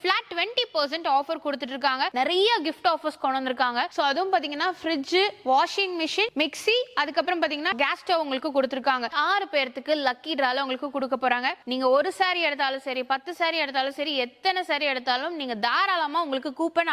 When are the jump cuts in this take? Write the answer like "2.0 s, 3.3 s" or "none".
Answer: 2.1 s, 7.7 s, 9.1 s, 11.6 s